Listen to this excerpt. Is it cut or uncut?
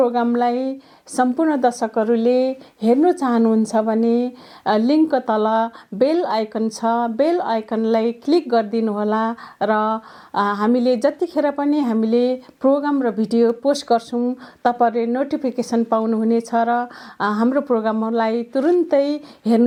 uncut